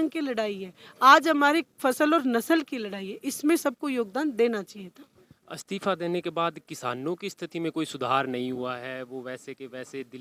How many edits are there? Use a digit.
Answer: 0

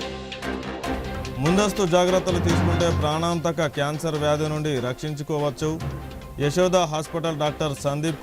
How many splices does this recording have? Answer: 1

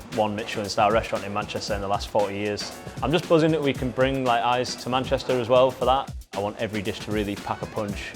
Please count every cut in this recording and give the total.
2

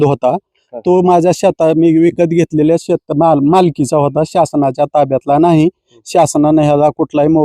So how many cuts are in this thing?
0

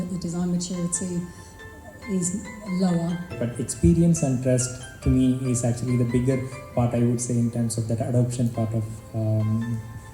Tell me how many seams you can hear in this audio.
1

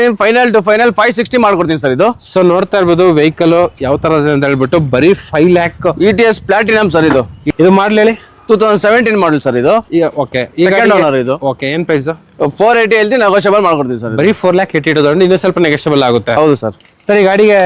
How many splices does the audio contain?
2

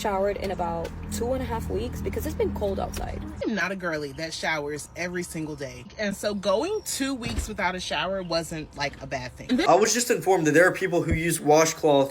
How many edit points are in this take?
3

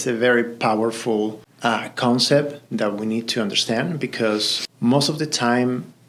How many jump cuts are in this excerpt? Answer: 2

